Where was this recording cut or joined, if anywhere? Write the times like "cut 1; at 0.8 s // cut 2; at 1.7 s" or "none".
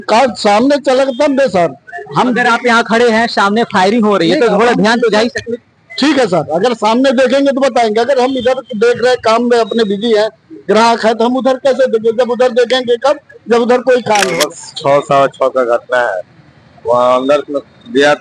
cut 1; at 14.3 s